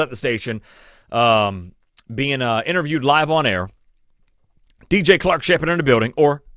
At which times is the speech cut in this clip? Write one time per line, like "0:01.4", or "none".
none